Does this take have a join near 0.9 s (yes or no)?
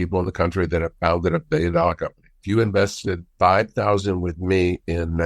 no